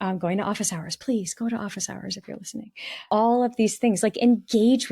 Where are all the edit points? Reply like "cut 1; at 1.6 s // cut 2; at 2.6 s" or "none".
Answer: cut 1; at 3.1 s

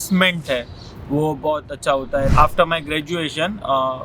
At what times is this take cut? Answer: cut 1; at 2.3 s

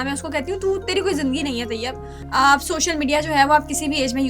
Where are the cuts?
cut 1; at 2.1 s

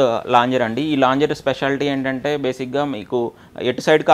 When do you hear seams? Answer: none

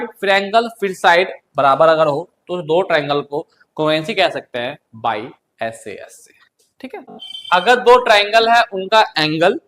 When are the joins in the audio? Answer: cut 1; at 7.3 s

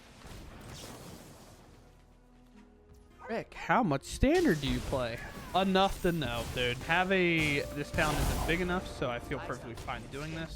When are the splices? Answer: cut 1; at 6.8 s

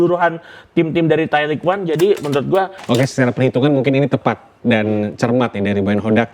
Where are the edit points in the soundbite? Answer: cut 1; at 2.8 s

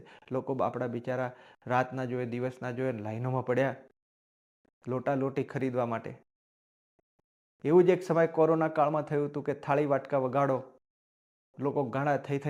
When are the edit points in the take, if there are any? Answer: none

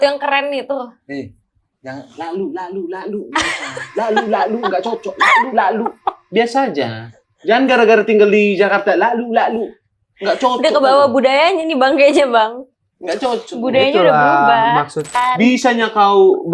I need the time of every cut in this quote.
cut 1; at 15.1 s

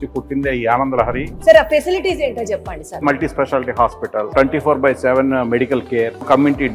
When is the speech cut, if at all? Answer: cut 1; at 1.3 s // cut 2; at 3.0 s // cut 3; at 4.3 s

